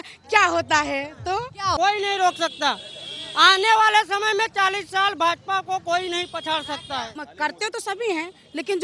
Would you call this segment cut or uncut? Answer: cut